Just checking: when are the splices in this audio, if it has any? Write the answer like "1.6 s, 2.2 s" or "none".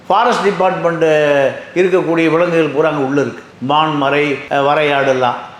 none